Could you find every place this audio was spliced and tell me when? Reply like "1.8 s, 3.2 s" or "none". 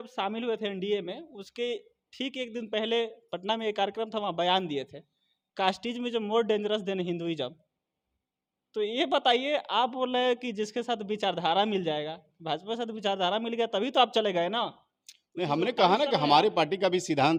none